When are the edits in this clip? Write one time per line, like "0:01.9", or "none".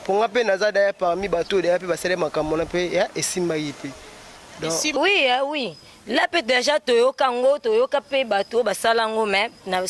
0:05.0